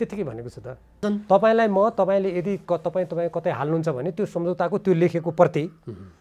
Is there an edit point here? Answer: yes; 1 cut; at 1.0 s

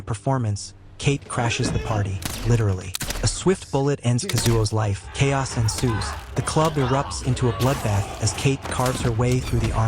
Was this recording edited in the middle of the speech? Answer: yes; 1 cut; at 5.0 s

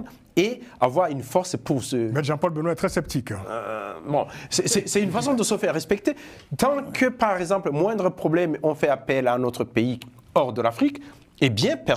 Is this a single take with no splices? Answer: yes; 0 cuts

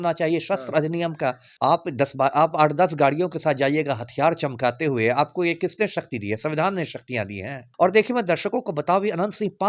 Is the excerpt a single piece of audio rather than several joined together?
no; 2 cuts; at 1.5 s, 7.6 s

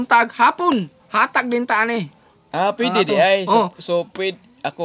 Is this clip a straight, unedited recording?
no; 1 cut; at 1.0 s

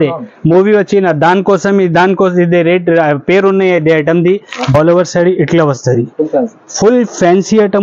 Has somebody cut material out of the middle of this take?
yes; 1 cut; at 4.7 s

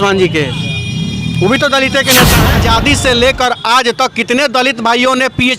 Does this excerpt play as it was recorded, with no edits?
no; 1 cut; at 2.4 s

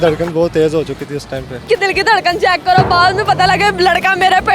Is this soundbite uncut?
no; 1 cut; at 1.7 s

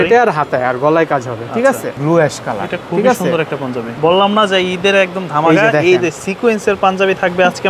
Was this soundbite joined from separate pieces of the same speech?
yes; 2 cuts; at 2.0 s, 3.9 s

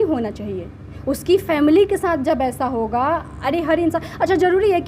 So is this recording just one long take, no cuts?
yes; 0 cuts

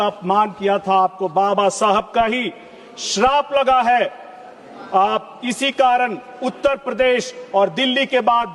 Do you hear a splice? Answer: no; 0 cuts

